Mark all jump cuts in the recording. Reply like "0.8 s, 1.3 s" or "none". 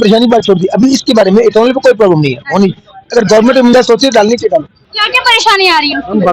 4.8 s

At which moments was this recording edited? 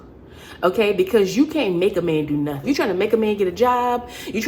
2.8 s

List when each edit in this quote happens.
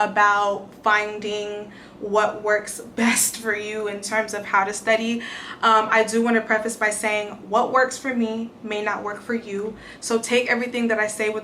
none

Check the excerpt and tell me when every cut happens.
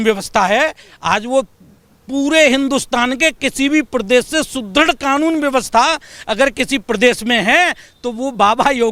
none

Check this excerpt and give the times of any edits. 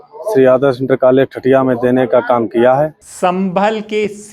3.0 s

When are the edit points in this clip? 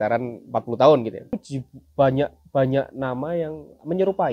1.4 s

